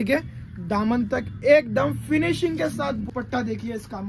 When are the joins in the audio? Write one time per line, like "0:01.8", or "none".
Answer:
0:03.1